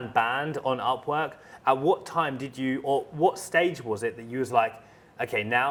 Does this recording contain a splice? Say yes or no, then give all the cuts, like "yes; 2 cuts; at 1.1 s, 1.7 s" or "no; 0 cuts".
no; 0 cuts